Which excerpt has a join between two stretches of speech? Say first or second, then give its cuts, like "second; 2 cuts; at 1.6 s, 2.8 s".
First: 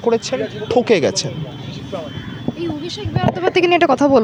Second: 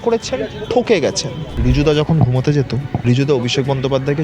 second; 2 cuts; at 1.4 s, 2.9 s